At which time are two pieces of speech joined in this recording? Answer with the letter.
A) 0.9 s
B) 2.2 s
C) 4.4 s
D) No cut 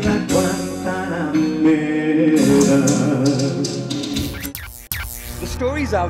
C